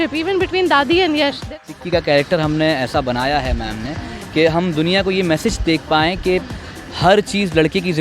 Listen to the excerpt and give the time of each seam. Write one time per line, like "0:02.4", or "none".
0:01.5